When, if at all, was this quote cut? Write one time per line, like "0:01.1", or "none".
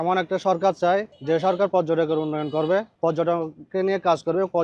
0:01.1
0:02.9